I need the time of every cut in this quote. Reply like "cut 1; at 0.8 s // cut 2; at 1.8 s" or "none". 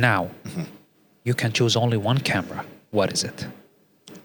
none